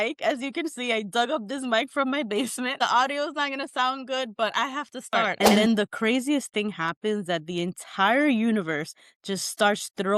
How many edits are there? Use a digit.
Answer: 2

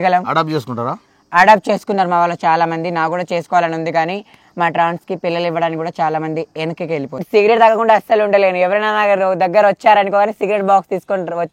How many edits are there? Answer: 1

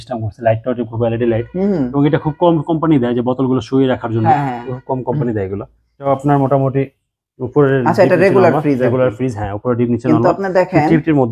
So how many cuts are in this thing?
1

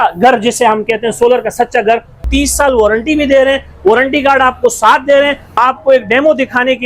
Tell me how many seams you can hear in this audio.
2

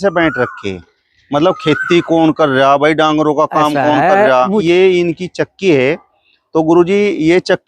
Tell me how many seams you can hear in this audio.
1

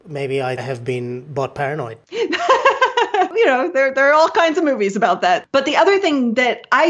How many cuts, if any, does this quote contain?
2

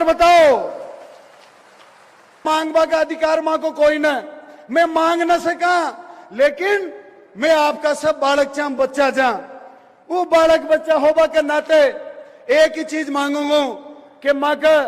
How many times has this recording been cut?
1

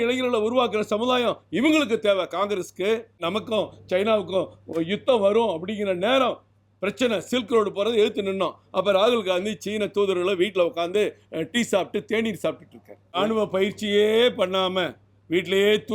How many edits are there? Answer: 2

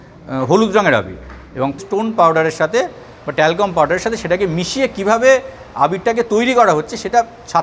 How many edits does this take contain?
1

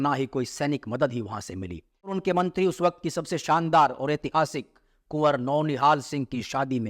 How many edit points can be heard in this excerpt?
1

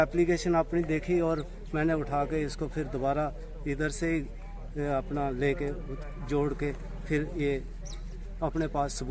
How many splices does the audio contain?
0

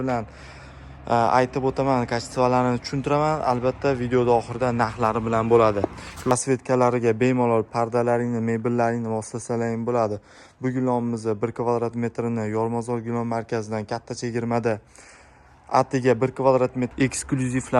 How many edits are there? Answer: 2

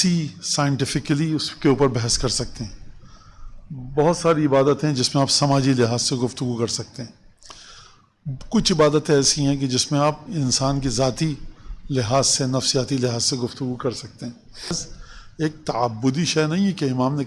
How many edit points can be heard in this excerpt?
1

